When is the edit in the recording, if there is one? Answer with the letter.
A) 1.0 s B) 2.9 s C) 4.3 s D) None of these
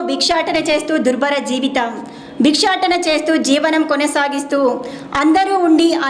D